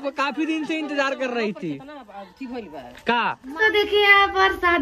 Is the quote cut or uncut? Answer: cut